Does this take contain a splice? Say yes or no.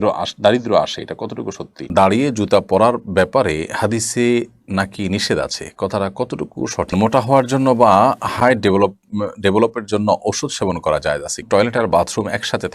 yes